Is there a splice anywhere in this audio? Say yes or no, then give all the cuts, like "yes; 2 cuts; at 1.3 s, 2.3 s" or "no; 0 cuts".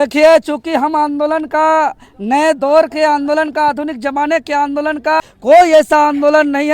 yes; 1 cut; at 5.3 s